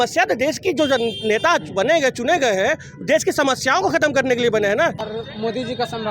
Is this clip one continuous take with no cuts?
no; 1 cut; at 5.1 s

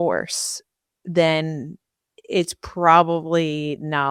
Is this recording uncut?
yes; 0 cuts

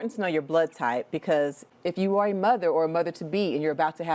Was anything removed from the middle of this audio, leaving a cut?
yes; 1 cut; at 1.6 s

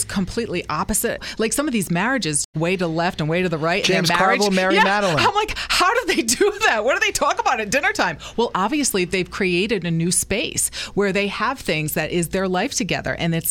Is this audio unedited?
no; 2 cuts; at 1.2 s, 2.5 s

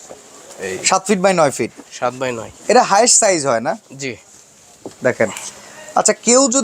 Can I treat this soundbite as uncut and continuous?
yes; 0 cuts

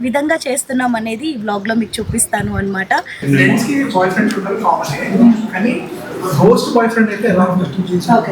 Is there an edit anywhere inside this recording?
yes; 1 cut; at 3.1 s

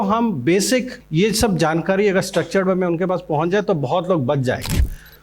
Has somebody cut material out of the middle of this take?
yes; 1 cut; at 1.0 s

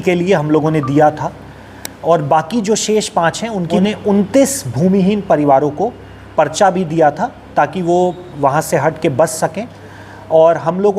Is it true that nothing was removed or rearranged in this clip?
no; 1 cut; at 3.8 s

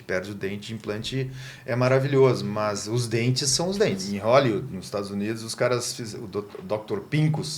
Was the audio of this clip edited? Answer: yes; 1 cut; at 4.0 s

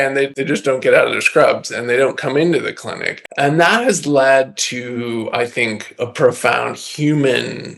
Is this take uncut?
yes; 0 cuts

